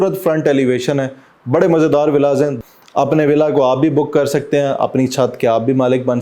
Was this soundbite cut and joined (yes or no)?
yes